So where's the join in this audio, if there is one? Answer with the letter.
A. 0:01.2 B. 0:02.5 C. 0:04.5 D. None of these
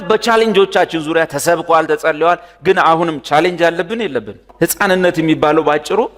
C